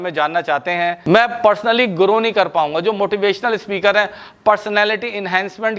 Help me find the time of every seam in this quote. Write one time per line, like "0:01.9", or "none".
0:01.0